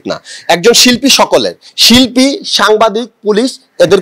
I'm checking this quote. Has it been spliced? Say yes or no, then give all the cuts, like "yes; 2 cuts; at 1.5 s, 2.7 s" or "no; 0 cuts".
yes; 1 cut; at 1.7 s